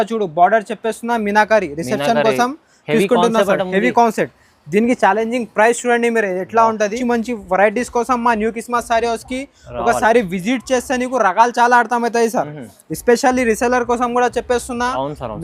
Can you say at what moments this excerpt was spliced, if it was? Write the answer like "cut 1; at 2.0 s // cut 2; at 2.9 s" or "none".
cut 1; at 7.0 s